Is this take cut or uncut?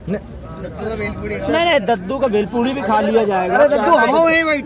uncut